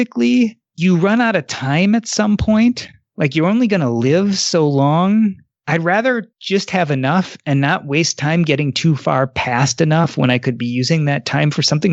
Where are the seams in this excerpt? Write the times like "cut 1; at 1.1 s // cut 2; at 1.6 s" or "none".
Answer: cut 1; at 5.5 s // cut 2; at 6.3 s